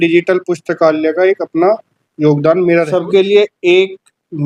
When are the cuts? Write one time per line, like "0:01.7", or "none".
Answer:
0:02.9